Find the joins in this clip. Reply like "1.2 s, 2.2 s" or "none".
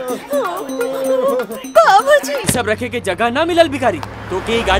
2.5 s